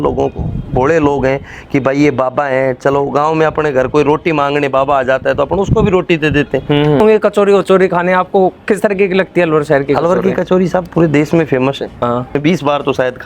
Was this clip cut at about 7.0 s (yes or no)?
yes